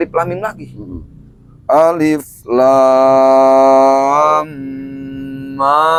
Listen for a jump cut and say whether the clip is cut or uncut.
uncut